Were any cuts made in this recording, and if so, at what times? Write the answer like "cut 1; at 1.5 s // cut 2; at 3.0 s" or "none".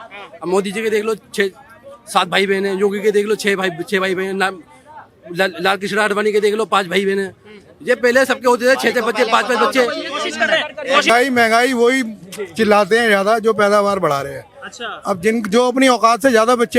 cut 1; at 11.1 s